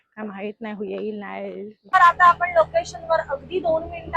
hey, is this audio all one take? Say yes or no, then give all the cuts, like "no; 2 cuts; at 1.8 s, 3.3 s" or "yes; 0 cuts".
no; 1 cut; at 1.9 s